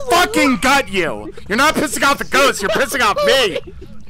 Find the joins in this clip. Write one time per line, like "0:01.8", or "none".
none